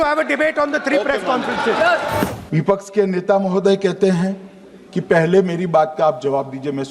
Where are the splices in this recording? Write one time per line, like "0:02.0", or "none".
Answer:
0:02.4